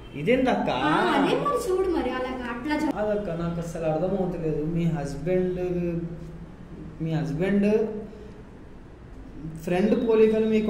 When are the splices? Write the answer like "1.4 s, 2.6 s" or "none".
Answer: 2.9 s

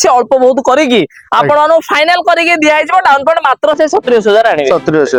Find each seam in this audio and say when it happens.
none

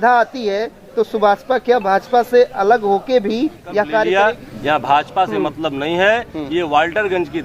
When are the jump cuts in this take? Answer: 4.1 s

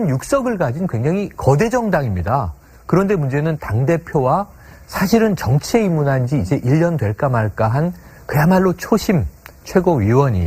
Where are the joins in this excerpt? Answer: 2.5 s

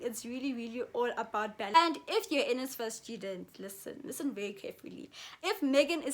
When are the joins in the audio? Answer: 1.8 s, 5.4 s

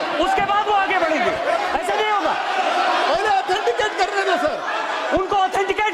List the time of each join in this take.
none

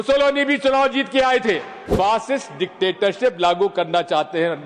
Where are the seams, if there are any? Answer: 1.8 s

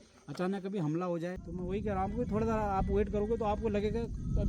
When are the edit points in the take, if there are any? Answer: 1.4 s

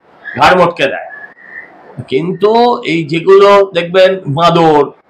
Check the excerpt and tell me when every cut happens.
none

